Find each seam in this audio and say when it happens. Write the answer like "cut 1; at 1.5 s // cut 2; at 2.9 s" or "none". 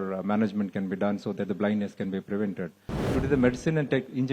cut 1; at 2.9 s